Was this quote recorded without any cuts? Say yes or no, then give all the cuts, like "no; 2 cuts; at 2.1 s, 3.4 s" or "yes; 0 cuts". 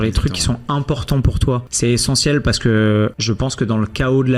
no; 2 cuts; at 1.7 s, 3.2 s